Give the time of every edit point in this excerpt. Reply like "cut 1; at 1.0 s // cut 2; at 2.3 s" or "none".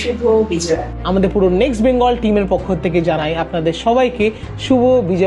cut 1; at 0.9 s